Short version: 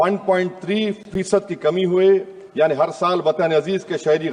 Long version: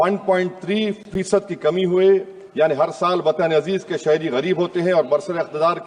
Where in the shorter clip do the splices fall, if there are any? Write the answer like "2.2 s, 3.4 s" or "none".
none